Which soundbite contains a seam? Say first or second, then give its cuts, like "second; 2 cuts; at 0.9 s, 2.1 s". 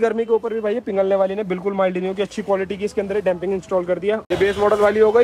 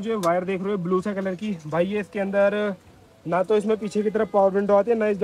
first; 1 cut; at 4.2 s